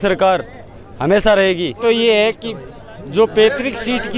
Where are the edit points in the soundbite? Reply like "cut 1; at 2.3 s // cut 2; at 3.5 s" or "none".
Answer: cut 1; at 1.8 s